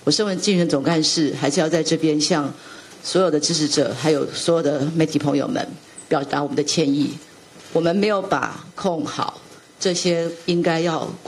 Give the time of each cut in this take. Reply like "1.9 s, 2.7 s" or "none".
none

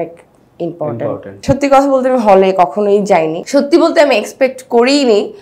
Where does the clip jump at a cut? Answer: 1.4 s, 3.4 s

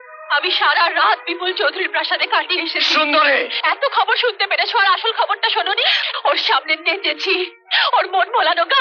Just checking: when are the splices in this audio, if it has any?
6.0 s

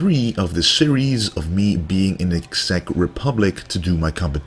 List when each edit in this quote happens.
none

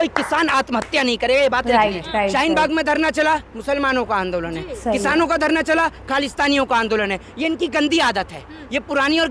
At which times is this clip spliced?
2.1 s

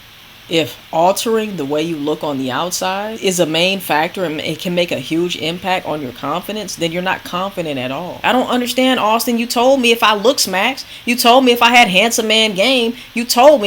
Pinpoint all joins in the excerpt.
3.2 s, 8.2 s

